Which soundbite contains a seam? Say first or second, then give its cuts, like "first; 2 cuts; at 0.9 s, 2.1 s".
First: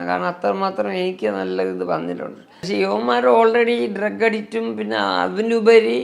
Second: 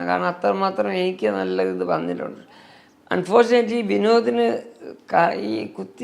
first; 1 cut; at 2.6 s